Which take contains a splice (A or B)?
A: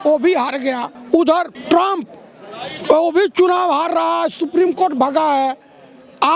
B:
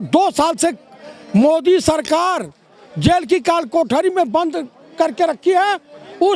A